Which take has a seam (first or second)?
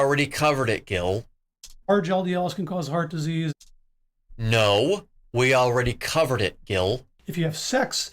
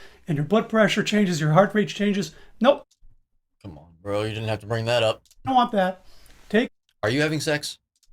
first